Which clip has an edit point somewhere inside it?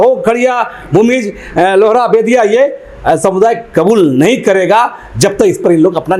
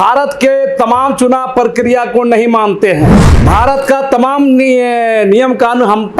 second; 1 cut; at 3.2 s

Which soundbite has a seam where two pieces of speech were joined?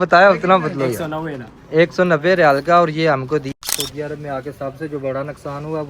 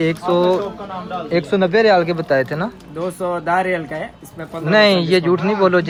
first; 1 cut; at 3.5 s

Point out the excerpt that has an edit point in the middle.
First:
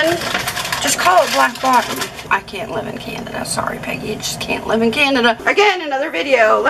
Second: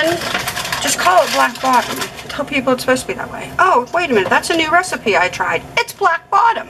first; 2 cuts; at 2.1 s, 5.4 s

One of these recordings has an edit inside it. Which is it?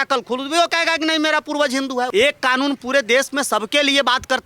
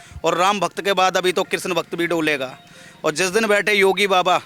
first; 1 cut; at 2.1 s

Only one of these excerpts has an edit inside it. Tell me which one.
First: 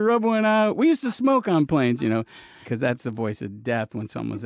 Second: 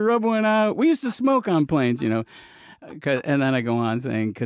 first; 1 cut; at 2.7 s

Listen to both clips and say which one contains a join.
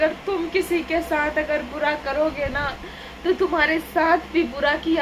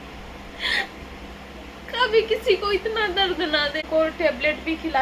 second; 1 cut; at 3.8 s

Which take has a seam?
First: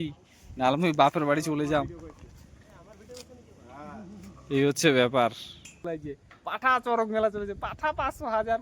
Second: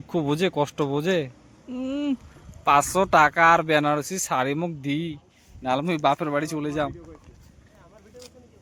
first; 1 cut; at 5.8 s

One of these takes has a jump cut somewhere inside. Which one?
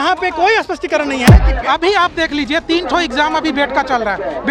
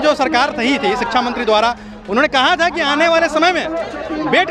first; 1 cut; at 1.3 s

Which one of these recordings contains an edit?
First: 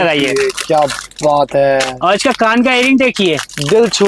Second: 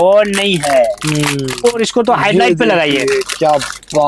second; 1 cut; at 1.6 s

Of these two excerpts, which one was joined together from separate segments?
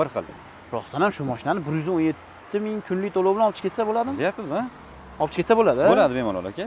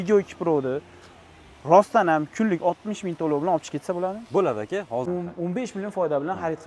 second; 1 cut; at 5.0 s

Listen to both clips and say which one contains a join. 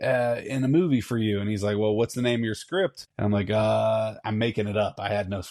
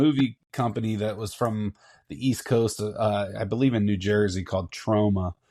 first; 1 cut; at 3.1 s

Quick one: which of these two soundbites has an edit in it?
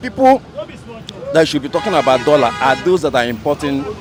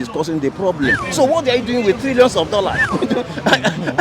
second; 2 cuts; at 1.0 s, 2.9 s

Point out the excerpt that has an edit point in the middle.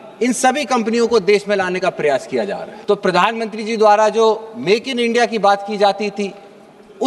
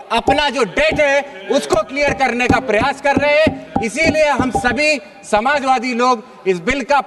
first; 1 cut; at 2.7 s

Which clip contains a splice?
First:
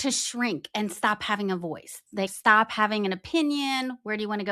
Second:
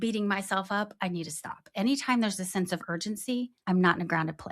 second; 1 cut; at 3.5 s

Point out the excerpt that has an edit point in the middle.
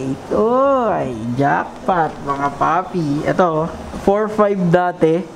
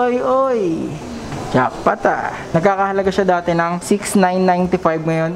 second; 2 cuts; at 2.4 s, 3.8 s

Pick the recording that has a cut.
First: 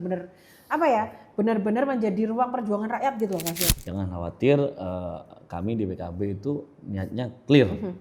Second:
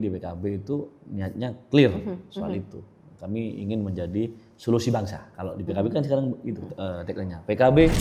first; 1 cut; at 3.7 s

